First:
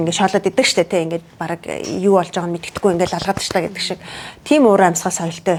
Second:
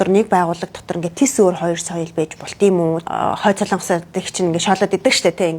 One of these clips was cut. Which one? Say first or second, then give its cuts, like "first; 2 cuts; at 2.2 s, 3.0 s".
second; 1 cut; at 3.4 s